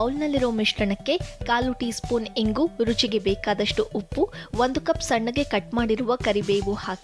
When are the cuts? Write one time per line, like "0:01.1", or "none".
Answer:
none

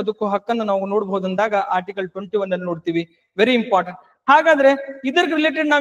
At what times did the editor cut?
none

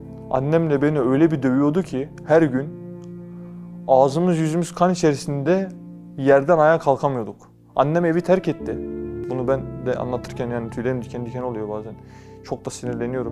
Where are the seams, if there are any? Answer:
0:09.2

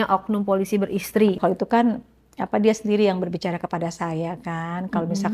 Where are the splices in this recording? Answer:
0:01.4

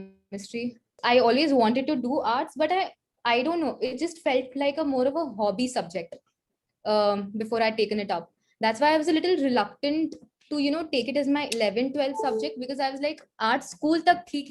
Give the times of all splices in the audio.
0:00.9

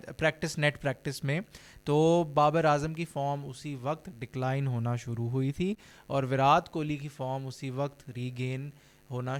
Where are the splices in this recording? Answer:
none

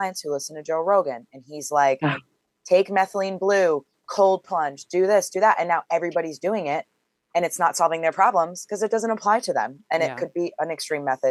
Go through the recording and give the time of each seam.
none

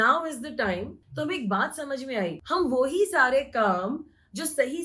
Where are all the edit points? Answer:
0:01.0
0:02.4

